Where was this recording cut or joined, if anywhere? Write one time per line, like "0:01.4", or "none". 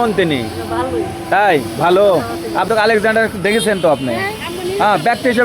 0:02.7